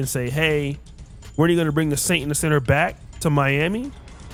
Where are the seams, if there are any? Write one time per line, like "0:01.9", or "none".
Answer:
none